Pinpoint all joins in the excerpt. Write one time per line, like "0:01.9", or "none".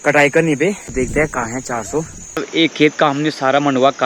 0:00.9
0:02.4